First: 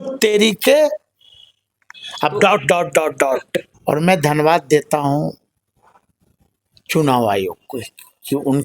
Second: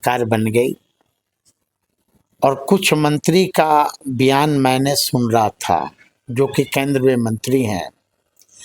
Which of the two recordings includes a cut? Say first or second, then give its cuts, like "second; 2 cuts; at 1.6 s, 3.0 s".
first; 1 cut; at 3.6 s